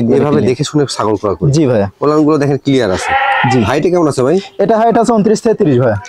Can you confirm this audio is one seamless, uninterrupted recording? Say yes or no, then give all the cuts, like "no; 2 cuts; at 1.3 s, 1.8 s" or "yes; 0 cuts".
yes; 0 cuts